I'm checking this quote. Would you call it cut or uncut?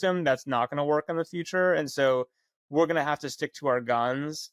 uncut